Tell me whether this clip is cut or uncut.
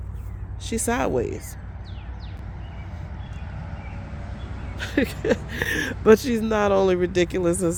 uncut